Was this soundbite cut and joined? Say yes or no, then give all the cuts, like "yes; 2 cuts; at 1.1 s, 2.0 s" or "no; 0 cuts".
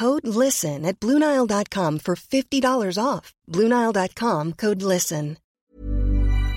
yes; 1 cut; at 5.4 s